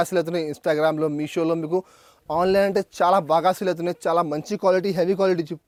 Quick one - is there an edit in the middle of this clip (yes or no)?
no